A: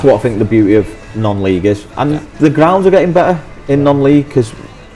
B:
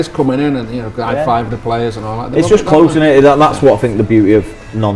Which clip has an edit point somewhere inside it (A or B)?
A